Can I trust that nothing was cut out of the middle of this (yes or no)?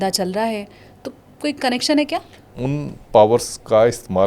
no